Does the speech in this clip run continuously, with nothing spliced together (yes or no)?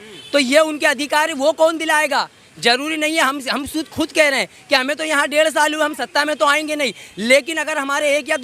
yes